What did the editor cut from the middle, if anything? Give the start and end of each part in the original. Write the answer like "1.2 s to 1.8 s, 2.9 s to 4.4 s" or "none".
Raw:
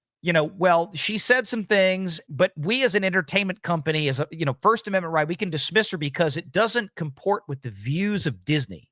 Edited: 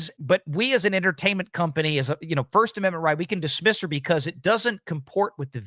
none